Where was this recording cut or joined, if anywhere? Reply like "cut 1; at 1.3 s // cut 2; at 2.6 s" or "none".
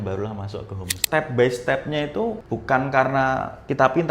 cut 1; at 1.0 s // cut 2; at 2.4 s